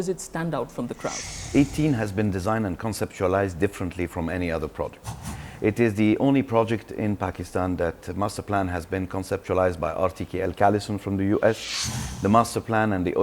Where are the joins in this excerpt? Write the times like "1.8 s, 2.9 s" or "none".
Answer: 1.4 s